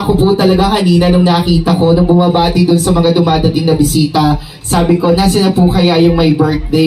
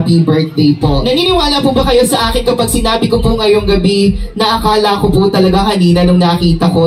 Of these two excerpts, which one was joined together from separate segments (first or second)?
second